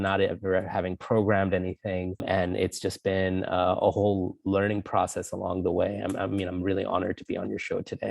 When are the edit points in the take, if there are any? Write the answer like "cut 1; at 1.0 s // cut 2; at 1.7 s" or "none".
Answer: cut 1; at 2.2 s